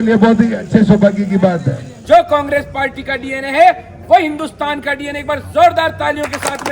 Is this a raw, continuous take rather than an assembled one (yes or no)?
no